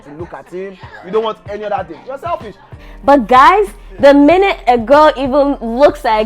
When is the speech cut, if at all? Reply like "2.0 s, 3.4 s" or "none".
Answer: 2.8 s